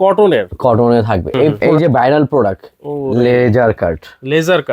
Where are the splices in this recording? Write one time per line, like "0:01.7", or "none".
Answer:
0:01.6